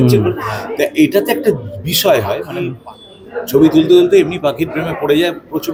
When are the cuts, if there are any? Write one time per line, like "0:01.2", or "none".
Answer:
none